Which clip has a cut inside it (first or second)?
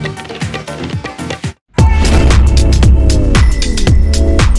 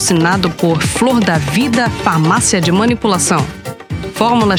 first